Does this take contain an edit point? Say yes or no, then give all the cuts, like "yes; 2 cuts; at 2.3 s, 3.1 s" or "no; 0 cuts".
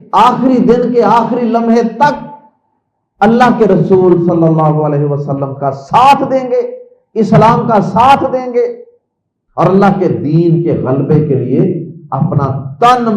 no; 0 cuts